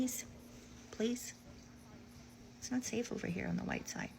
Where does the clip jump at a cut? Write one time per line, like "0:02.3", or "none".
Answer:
none